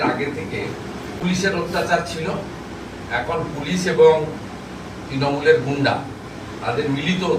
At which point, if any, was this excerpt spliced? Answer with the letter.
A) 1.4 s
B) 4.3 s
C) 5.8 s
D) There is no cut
D